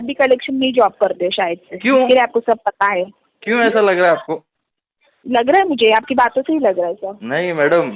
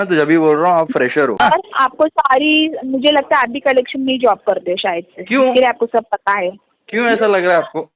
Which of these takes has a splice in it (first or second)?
second